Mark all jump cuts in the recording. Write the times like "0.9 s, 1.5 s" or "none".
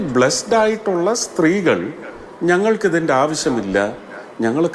none